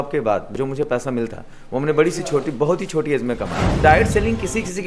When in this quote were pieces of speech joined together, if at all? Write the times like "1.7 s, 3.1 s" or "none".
3.8 s